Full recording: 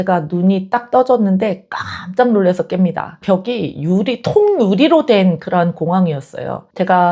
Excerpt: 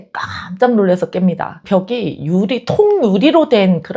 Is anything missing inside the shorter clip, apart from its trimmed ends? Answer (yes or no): no